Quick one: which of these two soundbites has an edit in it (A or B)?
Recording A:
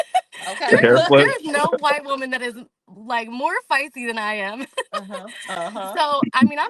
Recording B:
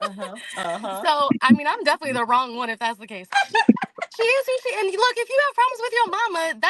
B